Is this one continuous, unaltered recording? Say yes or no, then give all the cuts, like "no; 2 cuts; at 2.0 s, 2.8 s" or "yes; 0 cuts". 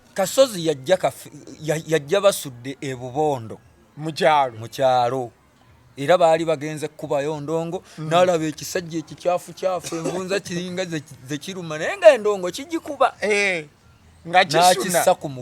yes; 0 cuts